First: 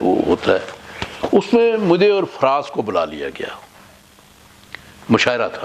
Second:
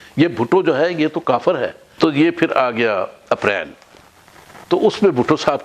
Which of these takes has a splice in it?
second; 1 cut; at 1.9 s

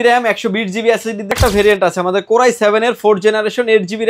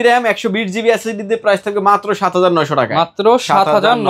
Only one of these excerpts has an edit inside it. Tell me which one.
first; 1 cut; at 1.4 s

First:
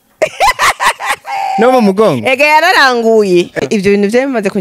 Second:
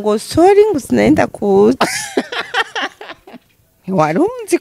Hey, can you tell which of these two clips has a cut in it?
first; 1 cut; at 3.5 s

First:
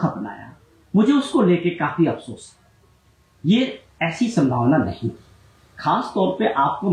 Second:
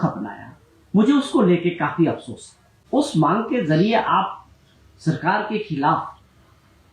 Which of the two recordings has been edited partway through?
second; 1 cut; at 2.8 s

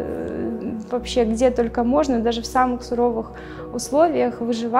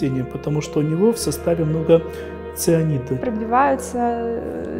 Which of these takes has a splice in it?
second; 1 cut; at 3.2 s

